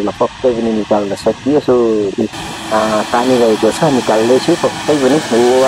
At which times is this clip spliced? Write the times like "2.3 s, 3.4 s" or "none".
2.3 s